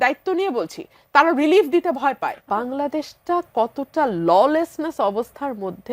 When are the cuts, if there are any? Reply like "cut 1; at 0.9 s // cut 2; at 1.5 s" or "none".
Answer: cut 1; at 2.4 s

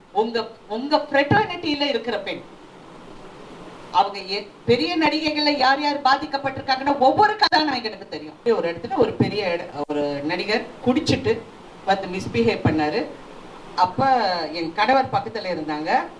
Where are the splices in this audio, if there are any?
cut 1; at 8.4 s

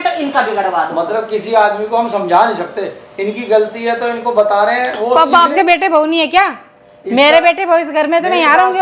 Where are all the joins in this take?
cut 1; at 5.5 s

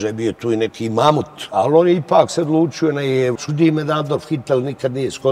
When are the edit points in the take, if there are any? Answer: cut 1; at 3.3 s

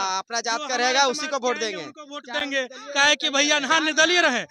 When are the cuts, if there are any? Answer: none

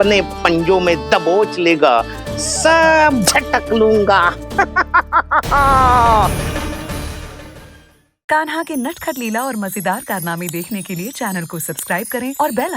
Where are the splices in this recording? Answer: cut 1; at 8.1 s

